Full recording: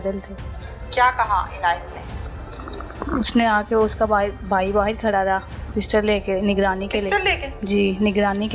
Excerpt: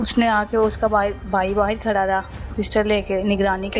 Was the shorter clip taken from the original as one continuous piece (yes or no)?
yes